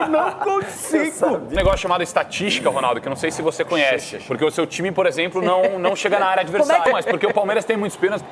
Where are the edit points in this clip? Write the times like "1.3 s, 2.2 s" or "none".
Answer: 1.5 s, 6.9 s